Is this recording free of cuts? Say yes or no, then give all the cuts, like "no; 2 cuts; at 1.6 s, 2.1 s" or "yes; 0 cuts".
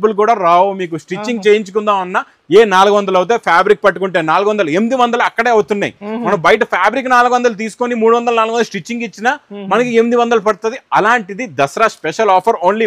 yes; 0 cuts